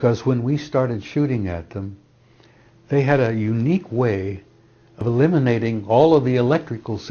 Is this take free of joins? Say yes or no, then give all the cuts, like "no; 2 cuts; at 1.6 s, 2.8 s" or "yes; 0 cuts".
no; 1 cut; at 5.0 s